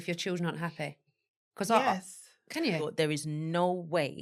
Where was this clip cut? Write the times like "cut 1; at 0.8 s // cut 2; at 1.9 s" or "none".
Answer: cut 1; at 2.9 s